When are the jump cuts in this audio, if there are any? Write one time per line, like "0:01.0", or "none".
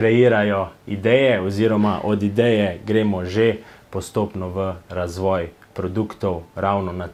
none